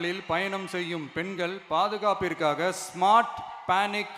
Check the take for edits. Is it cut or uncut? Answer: uncut